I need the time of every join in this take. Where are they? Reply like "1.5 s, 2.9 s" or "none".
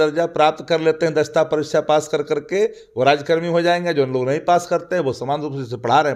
none